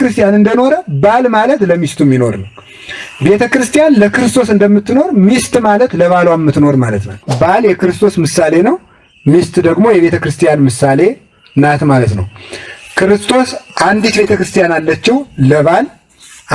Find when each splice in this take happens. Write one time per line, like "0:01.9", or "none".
0:07.3